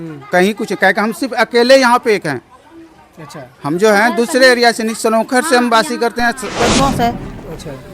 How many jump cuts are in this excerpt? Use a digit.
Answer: 1